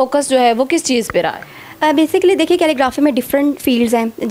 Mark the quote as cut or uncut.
uncut